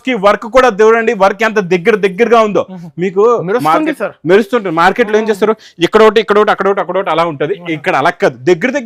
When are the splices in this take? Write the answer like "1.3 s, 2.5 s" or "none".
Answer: none